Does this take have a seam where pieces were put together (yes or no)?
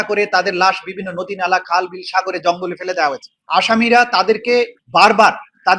yes